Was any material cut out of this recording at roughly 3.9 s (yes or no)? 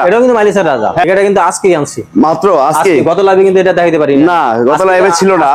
no